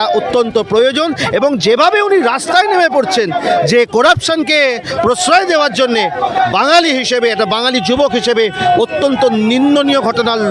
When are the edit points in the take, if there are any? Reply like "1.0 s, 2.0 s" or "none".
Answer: none